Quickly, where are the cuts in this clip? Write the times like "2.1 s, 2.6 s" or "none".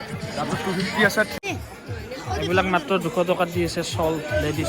1.3 s